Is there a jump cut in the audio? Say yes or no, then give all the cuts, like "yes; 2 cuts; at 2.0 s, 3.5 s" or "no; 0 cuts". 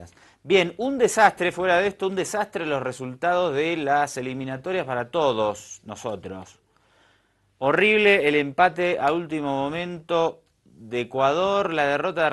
yes; 1 cut; at 2.3 s